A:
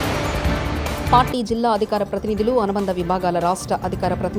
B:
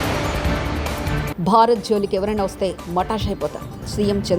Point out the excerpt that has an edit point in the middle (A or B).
B